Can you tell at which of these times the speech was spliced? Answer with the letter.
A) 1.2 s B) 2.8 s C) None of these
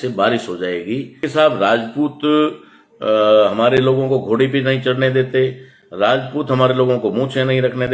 A